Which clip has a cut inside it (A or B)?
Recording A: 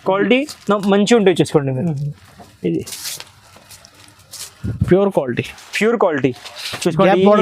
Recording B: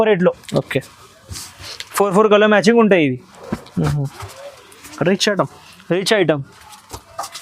A